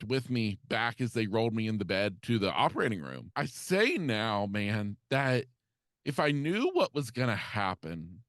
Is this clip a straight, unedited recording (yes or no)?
no